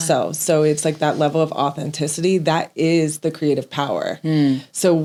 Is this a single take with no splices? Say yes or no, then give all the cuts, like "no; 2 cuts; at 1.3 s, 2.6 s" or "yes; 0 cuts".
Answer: yes; 0 cuts